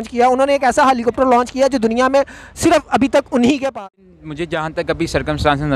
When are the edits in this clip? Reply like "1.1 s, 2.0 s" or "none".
3.8 s